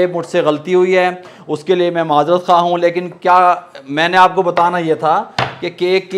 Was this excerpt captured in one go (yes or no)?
yes